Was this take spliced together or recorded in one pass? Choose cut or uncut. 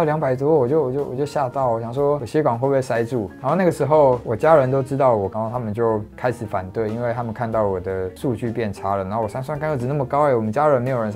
cut